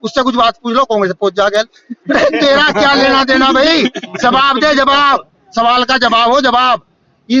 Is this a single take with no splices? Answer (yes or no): yes